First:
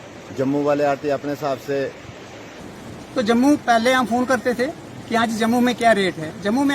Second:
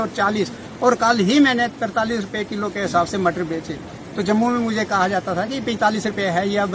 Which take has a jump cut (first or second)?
first